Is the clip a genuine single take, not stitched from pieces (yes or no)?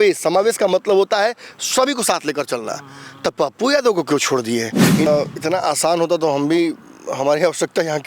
no